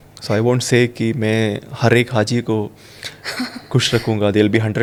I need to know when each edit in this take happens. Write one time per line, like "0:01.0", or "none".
none